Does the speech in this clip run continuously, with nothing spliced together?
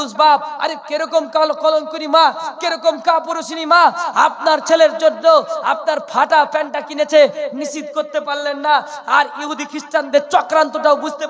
yes; 0 cuts

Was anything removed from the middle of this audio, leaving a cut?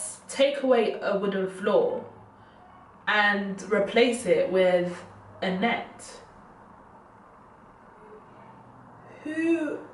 no; 0 cuts

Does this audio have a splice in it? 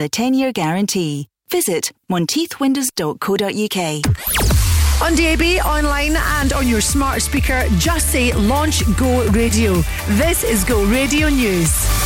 yes; 1 cut; at 4.1 s

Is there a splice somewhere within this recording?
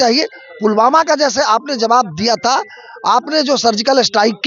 no; 0 cuts

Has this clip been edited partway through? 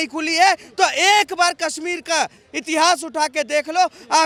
no; 0 cuts

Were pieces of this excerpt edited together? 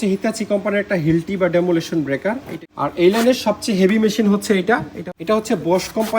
yes; 2 cuts; at 2.6 s, 4.9 s

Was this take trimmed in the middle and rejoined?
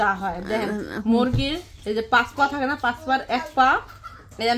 no; 0 cuts

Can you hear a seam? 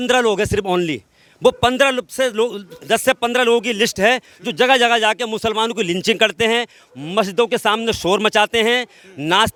no; 0 cuts

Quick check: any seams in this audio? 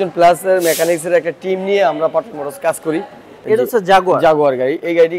yes; 1 cut; at 3.3 s

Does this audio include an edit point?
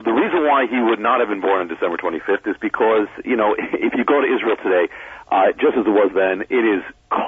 no; 0 cuts

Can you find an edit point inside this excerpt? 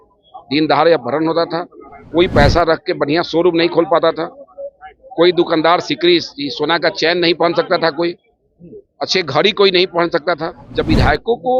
yes; 1 cut; at 10.6 s

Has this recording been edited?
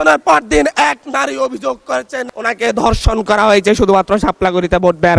no; 0 cuts

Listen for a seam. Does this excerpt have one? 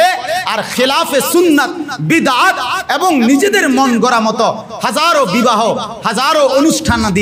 no; 0 cuts

